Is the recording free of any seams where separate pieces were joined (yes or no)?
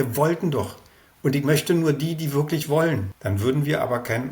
no